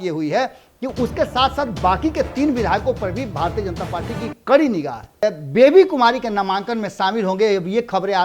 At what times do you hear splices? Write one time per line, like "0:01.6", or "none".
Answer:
0:05.2